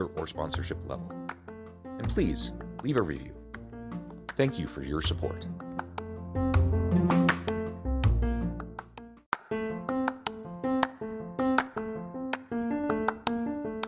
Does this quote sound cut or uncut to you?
cut